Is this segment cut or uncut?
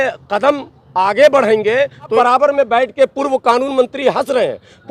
cut